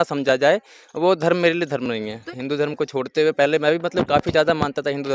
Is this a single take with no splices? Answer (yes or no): no